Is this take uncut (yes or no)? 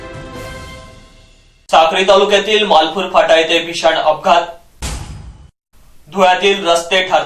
no